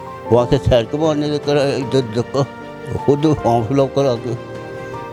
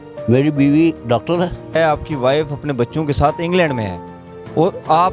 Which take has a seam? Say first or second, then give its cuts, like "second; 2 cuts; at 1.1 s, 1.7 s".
second; 1 cut; at 1.8 s